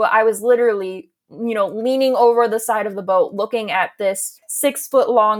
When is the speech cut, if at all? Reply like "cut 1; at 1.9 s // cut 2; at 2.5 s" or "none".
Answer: cut 1; at 4.4 s